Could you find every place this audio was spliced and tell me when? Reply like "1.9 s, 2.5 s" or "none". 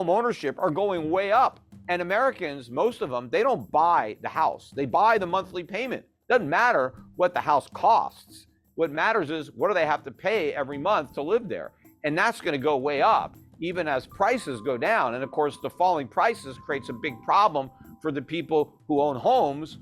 1.7 s